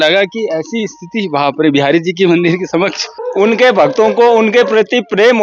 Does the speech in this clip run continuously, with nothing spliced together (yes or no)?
no